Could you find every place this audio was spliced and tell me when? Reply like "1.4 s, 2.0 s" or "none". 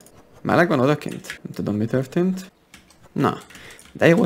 1.4 s, 2.5 s